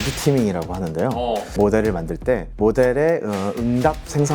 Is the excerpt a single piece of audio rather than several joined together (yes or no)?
no